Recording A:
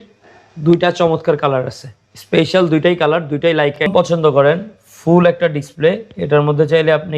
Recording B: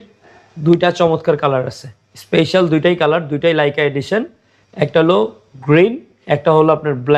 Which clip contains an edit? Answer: A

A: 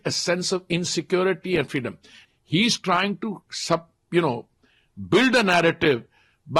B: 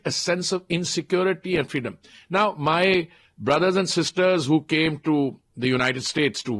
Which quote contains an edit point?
A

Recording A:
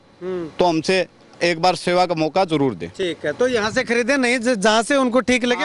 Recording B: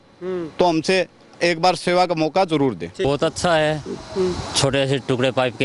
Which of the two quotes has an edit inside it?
B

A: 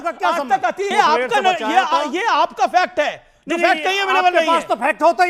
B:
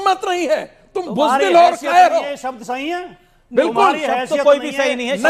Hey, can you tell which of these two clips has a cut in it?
A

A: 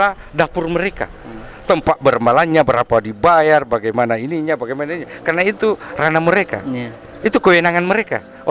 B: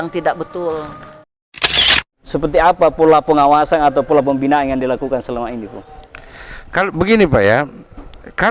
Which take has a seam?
B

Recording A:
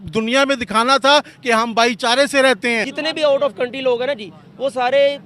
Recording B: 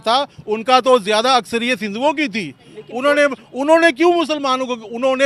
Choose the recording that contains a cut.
A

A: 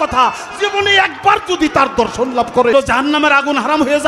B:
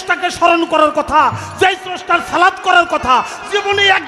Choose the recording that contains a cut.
A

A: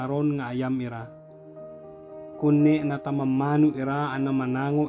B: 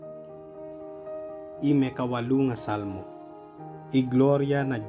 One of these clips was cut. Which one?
B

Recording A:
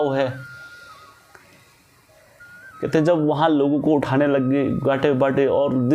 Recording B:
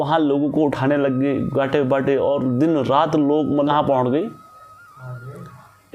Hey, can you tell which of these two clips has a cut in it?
B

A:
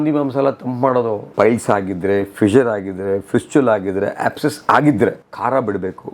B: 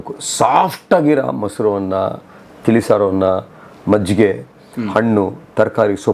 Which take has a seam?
A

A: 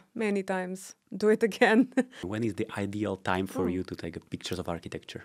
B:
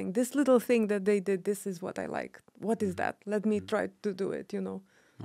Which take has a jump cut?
A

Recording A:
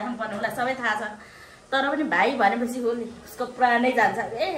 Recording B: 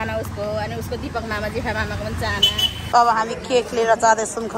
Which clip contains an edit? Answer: B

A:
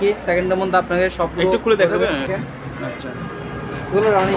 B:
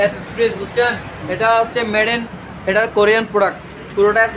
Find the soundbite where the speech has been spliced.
A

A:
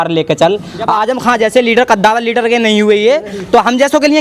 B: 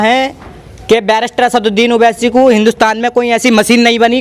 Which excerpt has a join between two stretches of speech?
A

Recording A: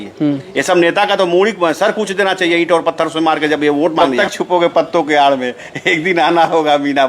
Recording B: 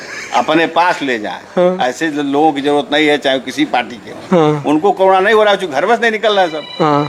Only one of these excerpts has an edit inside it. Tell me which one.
A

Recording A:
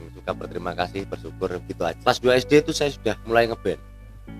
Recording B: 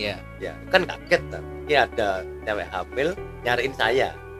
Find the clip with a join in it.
A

